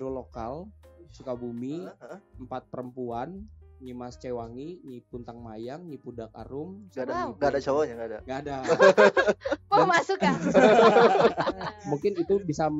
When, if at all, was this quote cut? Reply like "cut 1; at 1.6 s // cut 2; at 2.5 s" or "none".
cut 1; at 11.8 s

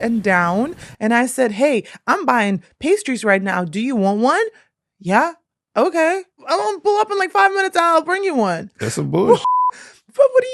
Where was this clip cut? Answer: cut 1; at 6.4 s // cut 2; at 8.7 s

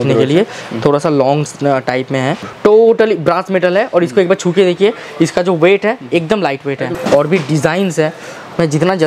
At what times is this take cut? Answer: cut 1; at 2.4 s // cut 2; at 6.9 s

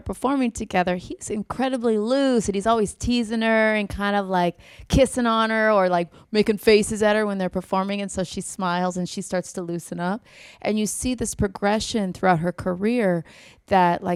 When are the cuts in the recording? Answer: none

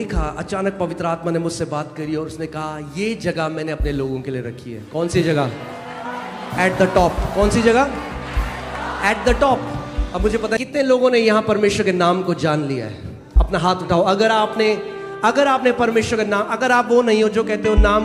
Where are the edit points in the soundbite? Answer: cut 1; at 10.6 s

